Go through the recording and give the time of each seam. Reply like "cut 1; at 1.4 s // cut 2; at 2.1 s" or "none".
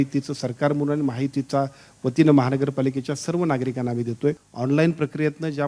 cut 1; at 4.5 s

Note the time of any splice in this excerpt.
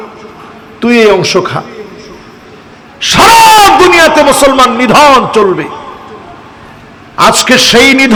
none

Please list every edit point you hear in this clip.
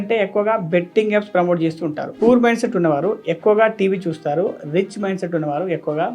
cut 1; at 2.1 s

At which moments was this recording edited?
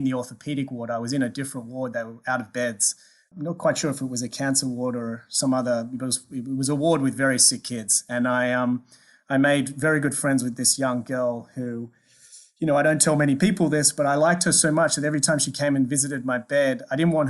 cut 1; at 3.3 s

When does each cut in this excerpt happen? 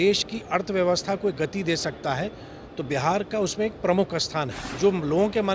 cut 1; at 4.6 s

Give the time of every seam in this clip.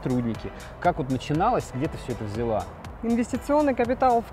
cut 1; at 2.8 s

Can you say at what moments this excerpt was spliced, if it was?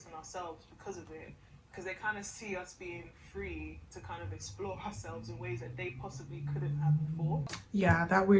cut 1; at 7.5 s

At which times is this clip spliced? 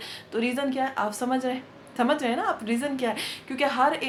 none

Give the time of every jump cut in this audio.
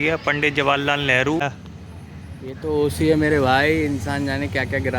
cut 1; at 1.4 s

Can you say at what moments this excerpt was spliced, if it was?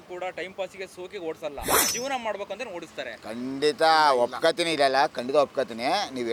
none

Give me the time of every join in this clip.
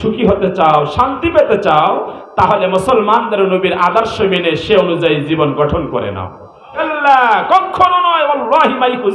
cut 1; at 6.8 s

